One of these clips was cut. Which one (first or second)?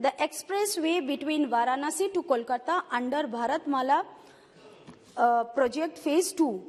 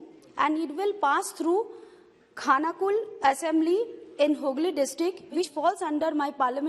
second